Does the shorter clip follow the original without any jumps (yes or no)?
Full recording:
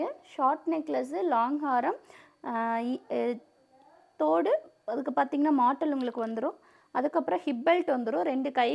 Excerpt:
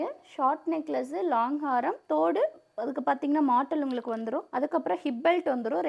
no